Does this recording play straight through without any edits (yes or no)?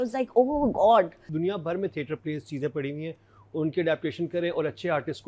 no